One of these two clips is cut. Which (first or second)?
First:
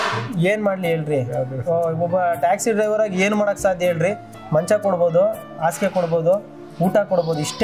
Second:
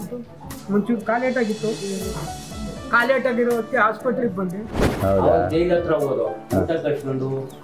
second